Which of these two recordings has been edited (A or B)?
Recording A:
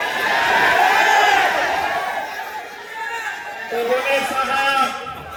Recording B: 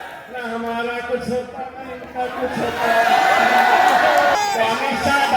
B